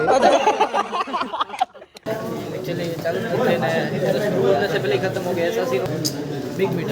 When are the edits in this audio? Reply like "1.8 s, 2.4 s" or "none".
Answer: 2.0 s, 5.8 s